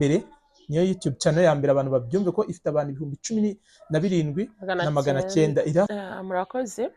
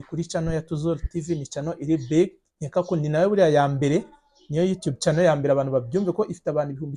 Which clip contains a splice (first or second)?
first